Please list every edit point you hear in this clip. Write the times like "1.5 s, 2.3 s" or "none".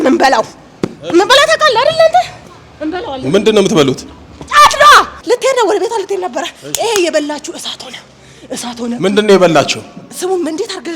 5.2 s